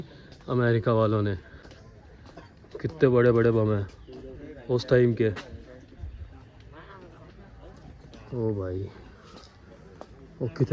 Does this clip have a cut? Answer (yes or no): no